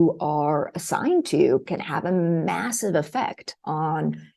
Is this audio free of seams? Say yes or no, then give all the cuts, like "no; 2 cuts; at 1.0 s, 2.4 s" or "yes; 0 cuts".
yes; 0 cuts